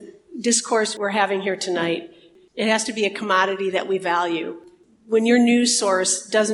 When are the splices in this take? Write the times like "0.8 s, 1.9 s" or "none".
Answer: 0.9 s, 2.2 s